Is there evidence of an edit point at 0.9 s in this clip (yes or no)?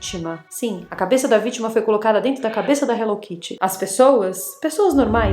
no